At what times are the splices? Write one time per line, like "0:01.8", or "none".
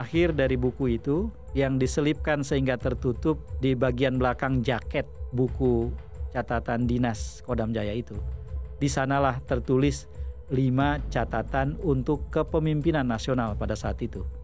none